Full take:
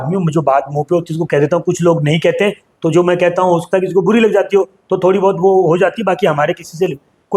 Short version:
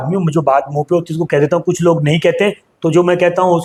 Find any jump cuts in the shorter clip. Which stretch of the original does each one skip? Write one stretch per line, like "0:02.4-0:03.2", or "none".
none